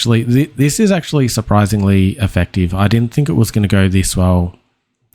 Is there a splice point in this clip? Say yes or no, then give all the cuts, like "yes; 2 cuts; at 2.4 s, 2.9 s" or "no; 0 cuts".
no; 0 cuts